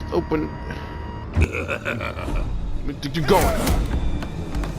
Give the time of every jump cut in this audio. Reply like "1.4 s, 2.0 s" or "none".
1.4 s